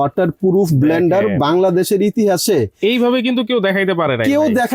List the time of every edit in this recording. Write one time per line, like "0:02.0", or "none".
none